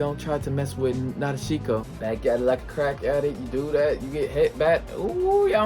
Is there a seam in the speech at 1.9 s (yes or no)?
yes